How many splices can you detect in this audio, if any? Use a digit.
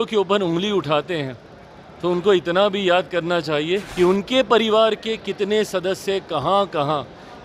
1